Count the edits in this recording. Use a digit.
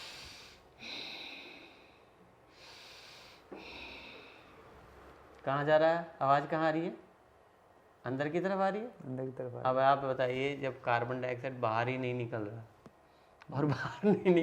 0